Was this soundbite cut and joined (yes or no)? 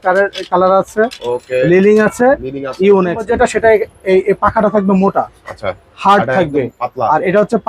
yes